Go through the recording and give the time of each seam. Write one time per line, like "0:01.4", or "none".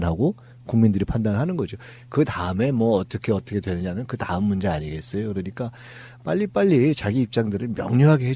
none